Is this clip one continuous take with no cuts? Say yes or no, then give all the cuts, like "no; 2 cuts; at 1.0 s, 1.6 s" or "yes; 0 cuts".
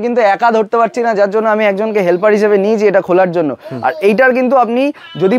yes; 0 cuts